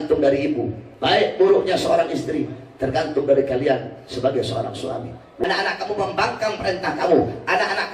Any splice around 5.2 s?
yes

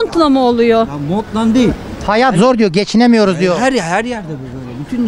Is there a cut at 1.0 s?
no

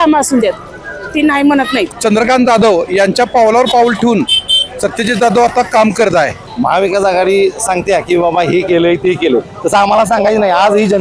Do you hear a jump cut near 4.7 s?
no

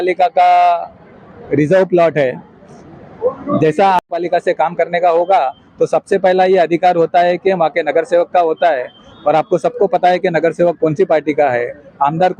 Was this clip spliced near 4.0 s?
yes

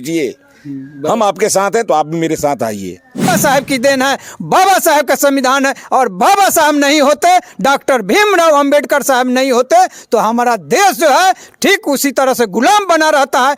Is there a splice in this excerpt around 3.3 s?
yes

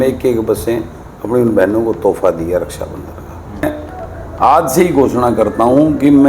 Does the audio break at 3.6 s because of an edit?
yes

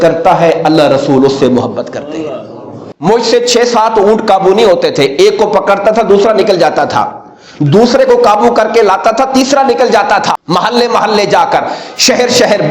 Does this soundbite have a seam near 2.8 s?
yes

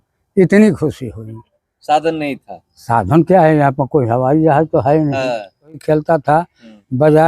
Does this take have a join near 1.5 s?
no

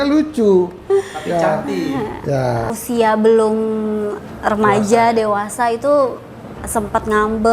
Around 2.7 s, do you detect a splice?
yes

